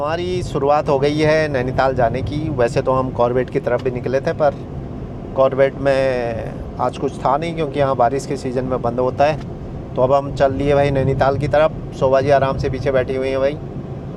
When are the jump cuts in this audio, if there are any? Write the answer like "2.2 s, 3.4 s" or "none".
none